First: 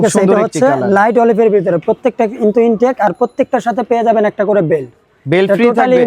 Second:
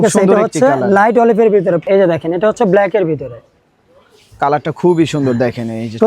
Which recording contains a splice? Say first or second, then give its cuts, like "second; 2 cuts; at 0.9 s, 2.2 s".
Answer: second; 1 cut; at 1.8 s